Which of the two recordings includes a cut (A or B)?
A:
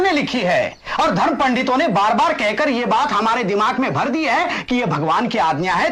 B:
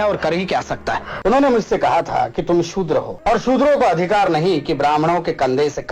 B